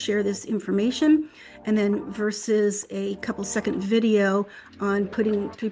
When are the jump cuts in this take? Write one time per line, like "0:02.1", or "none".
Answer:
none